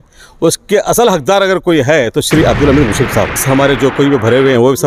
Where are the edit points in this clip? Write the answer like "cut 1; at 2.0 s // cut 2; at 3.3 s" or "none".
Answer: cut 1; at 3.4 s